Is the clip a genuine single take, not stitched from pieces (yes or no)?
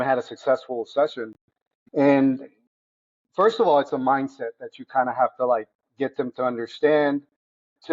no